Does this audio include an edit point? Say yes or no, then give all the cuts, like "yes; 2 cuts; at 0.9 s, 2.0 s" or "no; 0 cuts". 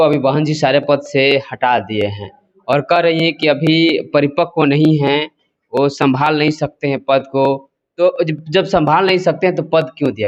no; 0 cuts